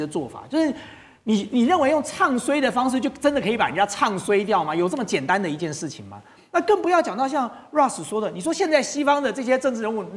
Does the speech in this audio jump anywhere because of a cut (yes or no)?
no